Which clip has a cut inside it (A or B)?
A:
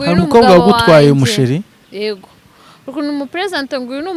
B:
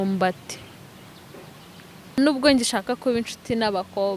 B